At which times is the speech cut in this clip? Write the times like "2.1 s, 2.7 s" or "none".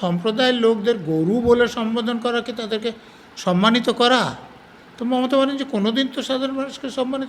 none